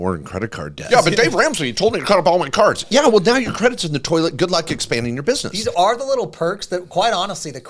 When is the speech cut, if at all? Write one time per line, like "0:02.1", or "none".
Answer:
0:00.8
0:05.5